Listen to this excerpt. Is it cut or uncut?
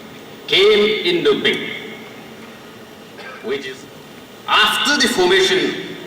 cut